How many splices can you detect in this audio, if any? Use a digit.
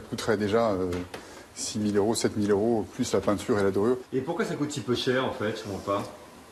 0